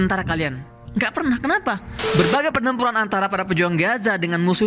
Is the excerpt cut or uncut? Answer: cut